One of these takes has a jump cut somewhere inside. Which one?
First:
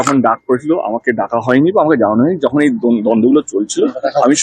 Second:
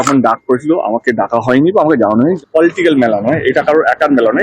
second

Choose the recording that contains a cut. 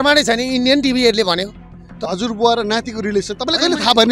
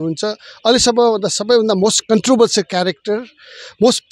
first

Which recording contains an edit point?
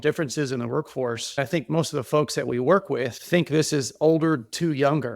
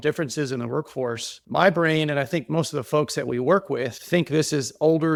first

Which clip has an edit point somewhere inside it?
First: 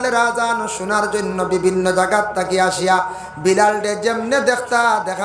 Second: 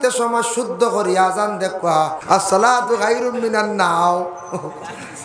second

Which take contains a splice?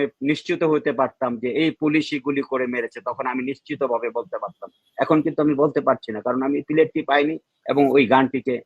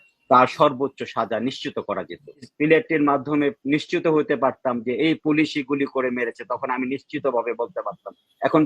second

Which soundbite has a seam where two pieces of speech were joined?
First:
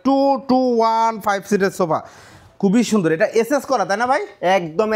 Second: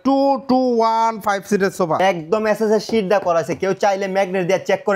second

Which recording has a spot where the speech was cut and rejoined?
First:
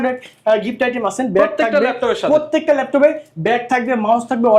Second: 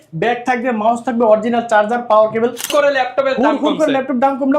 second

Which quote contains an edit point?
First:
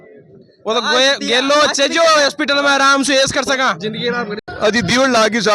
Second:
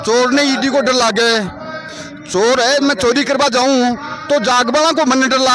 first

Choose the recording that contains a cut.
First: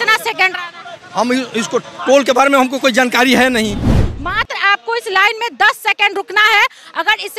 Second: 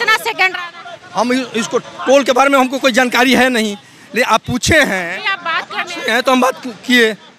first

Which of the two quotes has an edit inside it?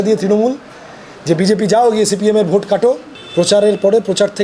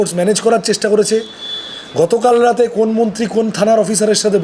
first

